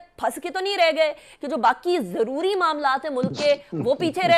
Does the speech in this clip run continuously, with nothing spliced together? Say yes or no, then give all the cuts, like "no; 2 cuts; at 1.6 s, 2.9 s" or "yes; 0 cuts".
yes; 0 cuts